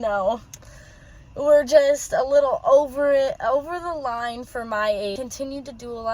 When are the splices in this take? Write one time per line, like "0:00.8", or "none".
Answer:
0:05.2